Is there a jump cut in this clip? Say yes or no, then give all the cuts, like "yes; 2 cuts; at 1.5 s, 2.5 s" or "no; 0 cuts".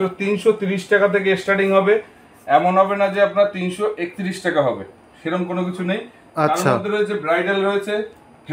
no; 0 cuts